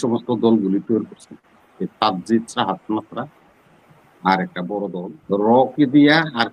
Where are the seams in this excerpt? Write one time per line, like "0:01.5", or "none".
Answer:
0:05.1

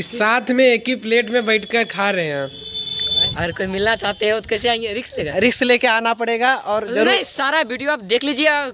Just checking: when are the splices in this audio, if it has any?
0:03.3

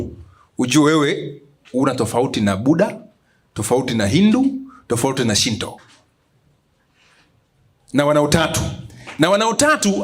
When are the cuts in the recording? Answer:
none

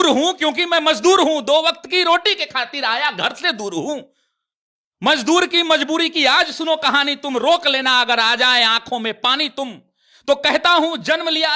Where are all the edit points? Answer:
none

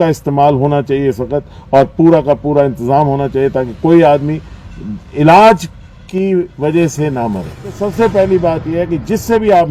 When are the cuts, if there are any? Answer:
0:07.8

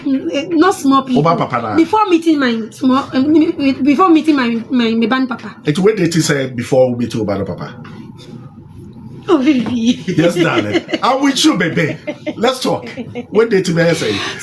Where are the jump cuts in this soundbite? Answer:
none

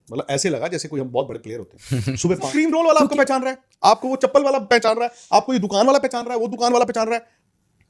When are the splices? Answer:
0:02.5

